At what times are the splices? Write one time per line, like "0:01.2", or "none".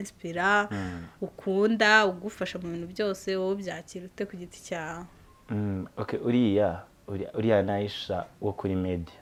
none